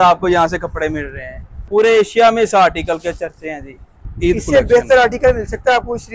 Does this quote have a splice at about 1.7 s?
yes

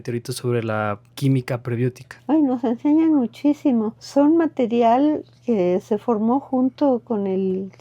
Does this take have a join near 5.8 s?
no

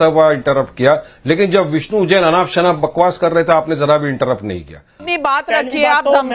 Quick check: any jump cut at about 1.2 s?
no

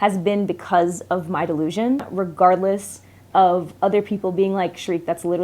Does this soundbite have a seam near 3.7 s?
no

